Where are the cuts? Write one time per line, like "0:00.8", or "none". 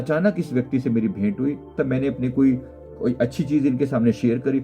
0:01.7
0:02.8